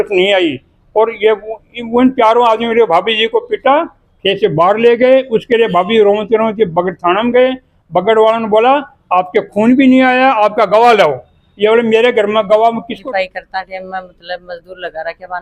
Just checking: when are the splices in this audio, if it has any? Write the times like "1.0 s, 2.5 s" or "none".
12.9 s